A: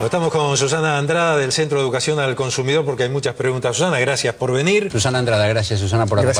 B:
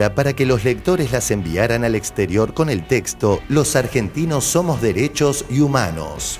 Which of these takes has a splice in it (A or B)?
A